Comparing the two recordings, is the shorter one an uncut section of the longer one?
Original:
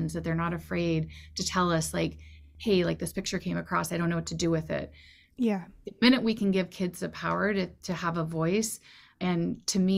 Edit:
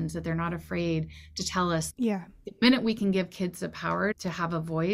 no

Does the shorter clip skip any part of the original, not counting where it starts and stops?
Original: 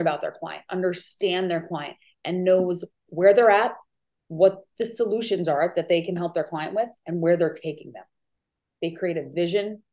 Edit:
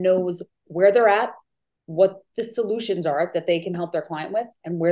no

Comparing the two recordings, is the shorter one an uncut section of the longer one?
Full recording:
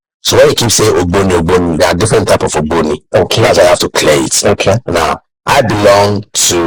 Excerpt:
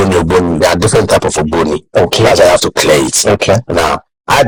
yes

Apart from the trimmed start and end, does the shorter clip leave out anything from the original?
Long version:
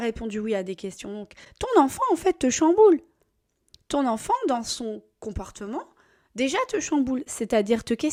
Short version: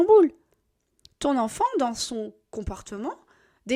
no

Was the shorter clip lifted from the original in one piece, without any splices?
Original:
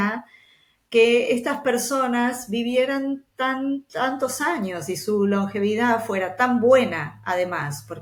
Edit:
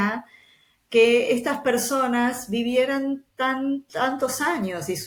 yes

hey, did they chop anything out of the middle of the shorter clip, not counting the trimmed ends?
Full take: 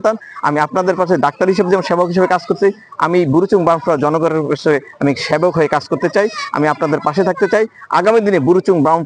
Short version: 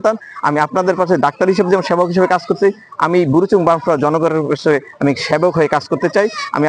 no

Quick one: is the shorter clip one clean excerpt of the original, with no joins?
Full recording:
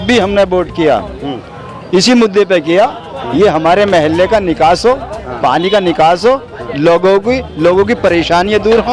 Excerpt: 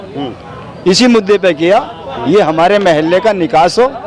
yes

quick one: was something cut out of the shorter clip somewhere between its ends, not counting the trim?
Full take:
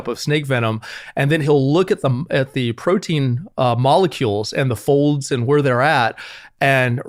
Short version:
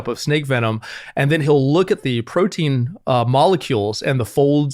yes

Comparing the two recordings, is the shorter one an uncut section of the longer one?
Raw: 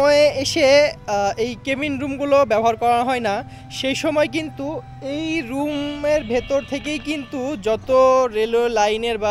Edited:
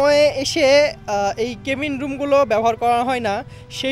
yes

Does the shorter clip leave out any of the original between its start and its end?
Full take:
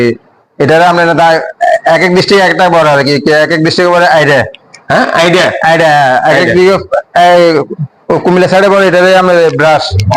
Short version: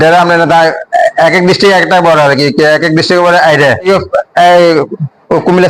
yes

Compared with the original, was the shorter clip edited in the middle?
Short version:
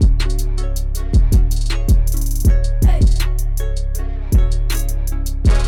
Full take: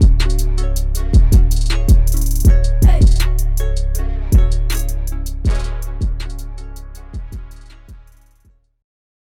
no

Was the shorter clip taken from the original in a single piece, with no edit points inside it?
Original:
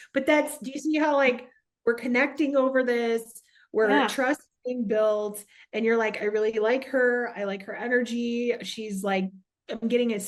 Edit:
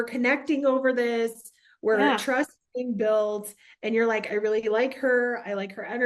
yes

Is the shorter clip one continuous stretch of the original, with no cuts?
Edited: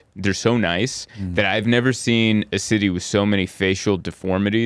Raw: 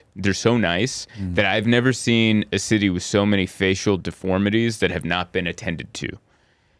yes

